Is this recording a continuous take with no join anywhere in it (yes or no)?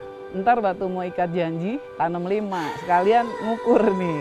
no